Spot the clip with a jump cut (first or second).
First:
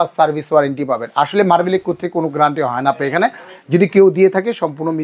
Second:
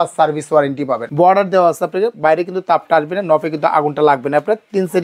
second